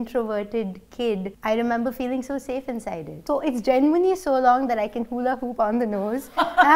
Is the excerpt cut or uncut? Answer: cut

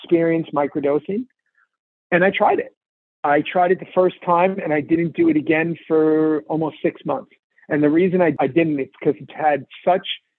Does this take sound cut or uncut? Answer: uncut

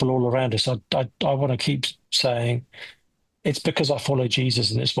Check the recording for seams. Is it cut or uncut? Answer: uncut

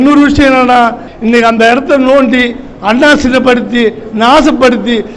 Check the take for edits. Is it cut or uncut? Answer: cut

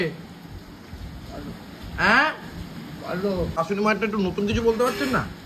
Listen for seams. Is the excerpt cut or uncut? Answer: cut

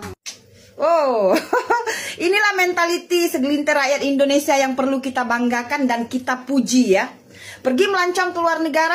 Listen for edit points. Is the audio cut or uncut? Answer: uncut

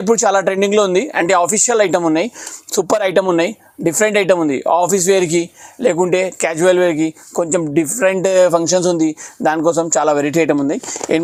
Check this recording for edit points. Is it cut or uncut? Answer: uncut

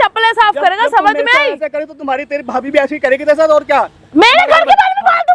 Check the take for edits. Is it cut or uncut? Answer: uncut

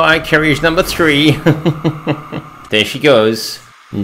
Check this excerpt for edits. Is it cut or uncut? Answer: cut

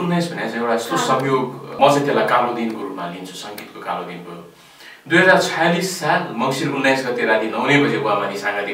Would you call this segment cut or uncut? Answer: cut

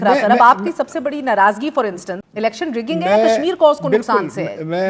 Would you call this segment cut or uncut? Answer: cut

